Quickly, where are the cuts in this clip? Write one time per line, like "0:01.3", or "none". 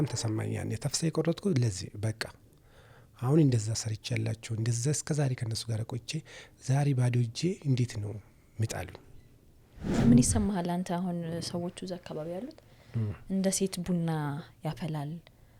0:09.9

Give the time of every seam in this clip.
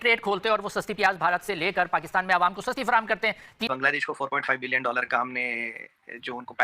0:03.7

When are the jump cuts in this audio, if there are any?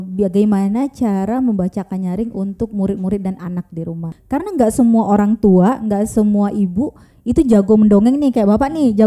0:04.1

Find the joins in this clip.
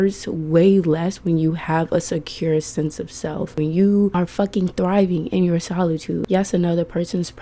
0:03.5
0:04.1
0:06.2

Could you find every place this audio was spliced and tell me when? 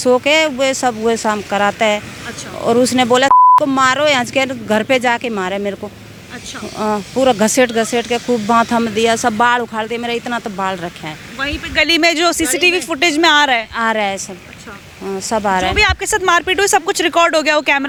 none

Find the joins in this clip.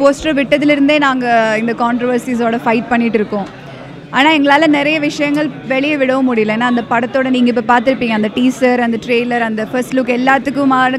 none

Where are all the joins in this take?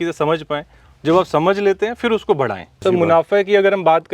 0:02.8

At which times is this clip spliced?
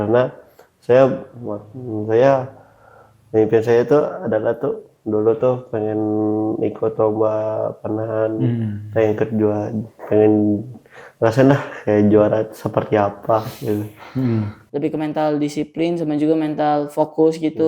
0:14.6

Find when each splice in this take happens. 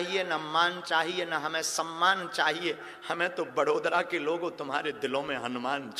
none

